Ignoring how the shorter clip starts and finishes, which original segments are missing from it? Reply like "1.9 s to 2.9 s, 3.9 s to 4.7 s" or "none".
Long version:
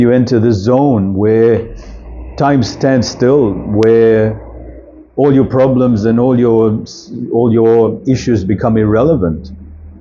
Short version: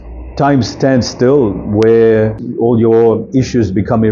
4.4 s to 7.2 s